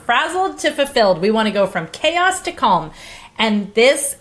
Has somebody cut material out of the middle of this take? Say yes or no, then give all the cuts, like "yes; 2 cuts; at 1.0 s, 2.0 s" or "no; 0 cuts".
no; 0 cuts